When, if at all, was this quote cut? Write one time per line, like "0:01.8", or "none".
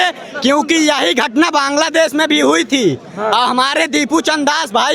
none